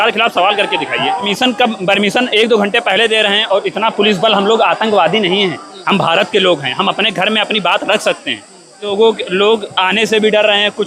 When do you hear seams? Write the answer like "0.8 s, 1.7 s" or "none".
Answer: 1.3 s, 8.9 s